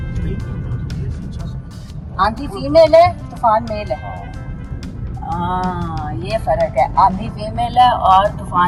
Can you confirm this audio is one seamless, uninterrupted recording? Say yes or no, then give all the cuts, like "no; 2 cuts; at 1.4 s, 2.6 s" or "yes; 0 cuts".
yes; 0 cuts